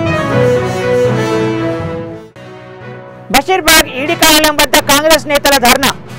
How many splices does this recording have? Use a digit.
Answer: 1